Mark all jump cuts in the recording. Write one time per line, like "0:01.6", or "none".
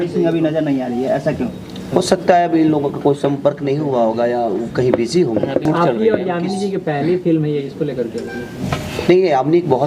0:05.6

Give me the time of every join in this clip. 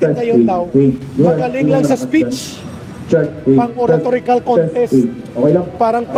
none

